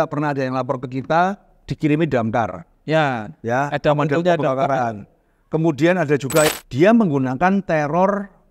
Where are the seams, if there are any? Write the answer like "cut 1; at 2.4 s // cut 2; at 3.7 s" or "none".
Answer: cut 1; at 6.5 s